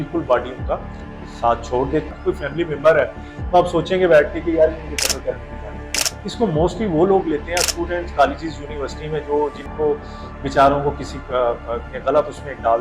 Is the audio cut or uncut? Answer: cut